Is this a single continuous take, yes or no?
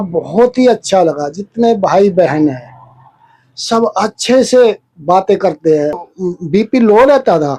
no